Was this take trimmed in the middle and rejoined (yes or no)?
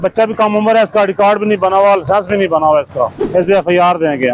yes